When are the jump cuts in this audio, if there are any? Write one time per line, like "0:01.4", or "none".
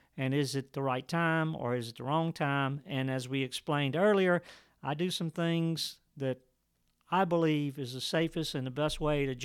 none